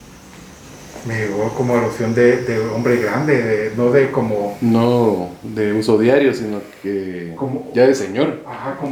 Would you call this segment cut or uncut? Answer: uncut